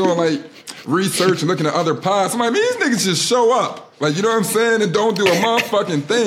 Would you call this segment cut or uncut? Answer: uncut